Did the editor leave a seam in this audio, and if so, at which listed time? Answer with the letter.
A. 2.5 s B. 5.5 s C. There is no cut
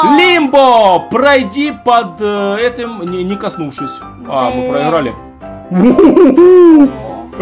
C